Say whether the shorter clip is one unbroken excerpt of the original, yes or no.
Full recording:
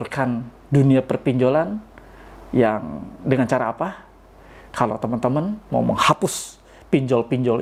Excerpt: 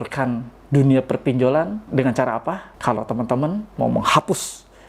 no